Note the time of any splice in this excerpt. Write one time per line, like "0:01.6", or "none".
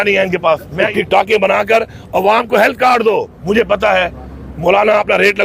0:00.9
0:03.3

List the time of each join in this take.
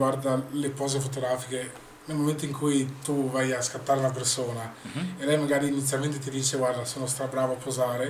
none

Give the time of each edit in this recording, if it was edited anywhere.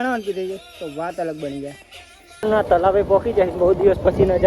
0:02.4

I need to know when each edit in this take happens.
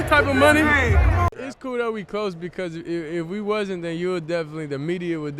0:01.2

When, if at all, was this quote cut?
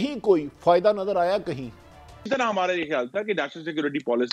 0:02.2

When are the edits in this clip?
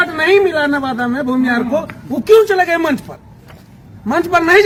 none

